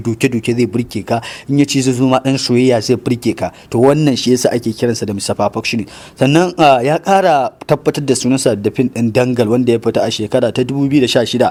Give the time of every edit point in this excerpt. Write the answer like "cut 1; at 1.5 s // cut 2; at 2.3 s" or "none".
none